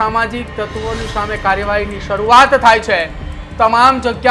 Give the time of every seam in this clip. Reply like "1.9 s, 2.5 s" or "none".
3.4 s